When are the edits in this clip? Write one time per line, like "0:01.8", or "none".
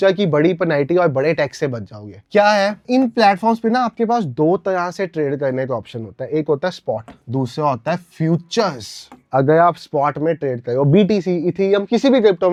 none